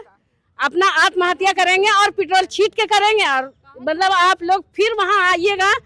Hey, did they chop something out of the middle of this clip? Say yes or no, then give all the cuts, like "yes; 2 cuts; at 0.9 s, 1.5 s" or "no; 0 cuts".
no; 0 cuts